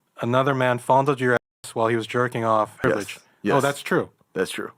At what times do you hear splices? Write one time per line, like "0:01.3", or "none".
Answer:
0:02.8